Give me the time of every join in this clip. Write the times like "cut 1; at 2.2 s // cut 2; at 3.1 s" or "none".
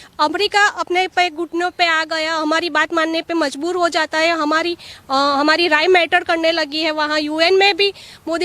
none